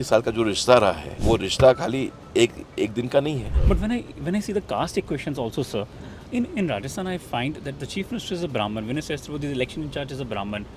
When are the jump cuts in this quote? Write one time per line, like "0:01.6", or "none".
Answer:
0:01.1
0:03.5